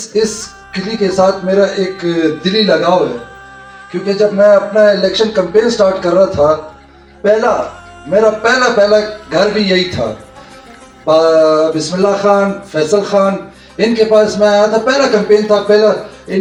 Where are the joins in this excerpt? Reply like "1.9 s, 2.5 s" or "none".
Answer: none